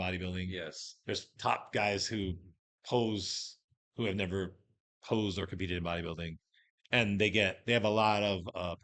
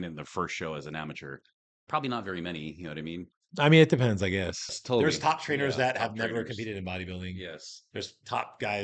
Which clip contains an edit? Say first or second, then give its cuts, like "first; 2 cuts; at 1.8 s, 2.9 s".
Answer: second; 2 cuts; at 3.4 s, 4.8 s